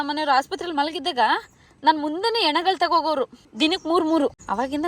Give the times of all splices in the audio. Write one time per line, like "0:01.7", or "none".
0:03.4